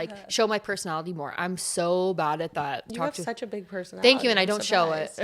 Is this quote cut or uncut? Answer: cut